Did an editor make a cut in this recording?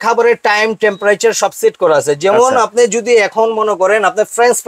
no; 0 cuts

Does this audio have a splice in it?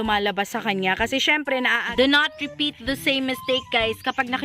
yes; 1 cut; at 1.9 s

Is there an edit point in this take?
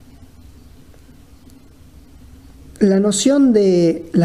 no; 0 cuts

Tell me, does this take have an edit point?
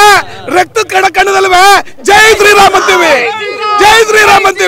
no; 0 cuts

